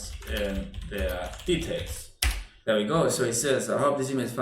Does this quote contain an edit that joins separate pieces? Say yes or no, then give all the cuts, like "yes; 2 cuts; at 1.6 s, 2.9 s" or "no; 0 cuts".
yes; 1 cut; at 2.5 s